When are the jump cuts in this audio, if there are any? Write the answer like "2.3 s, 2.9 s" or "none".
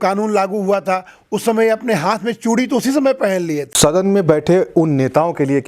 3.7 s